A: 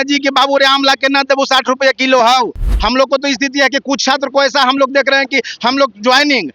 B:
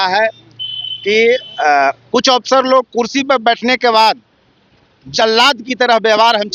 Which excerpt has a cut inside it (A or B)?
A